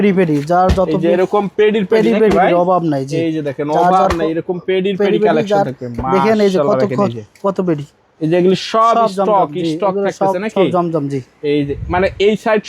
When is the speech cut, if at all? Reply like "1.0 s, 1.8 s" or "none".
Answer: none